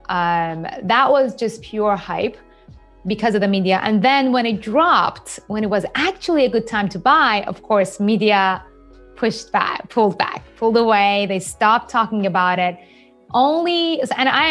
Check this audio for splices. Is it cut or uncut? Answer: uncut